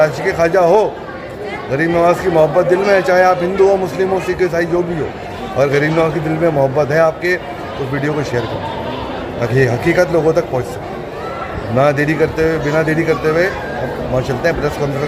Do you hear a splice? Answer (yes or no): no